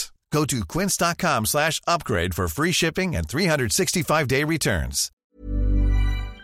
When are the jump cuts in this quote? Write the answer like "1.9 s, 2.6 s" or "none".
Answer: 5.2 s